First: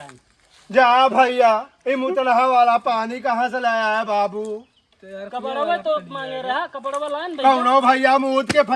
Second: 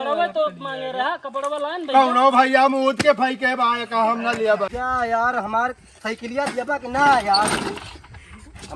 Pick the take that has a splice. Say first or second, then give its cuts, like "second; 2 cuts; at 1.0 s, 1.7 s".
second; 1 cut; at 4.7 s